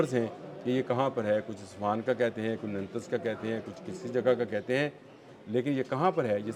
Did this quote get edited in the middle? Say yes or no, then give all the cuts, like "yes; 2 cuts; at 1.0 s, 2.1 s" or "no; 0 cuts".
no; 0 cuts